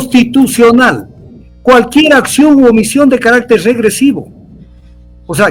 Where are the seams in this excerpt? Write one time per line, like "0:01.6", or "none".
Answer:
none